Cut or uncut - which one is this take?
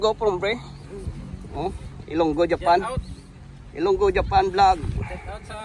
uncut